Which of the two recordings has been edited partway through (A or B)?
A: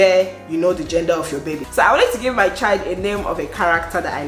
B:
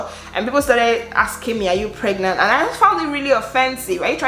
A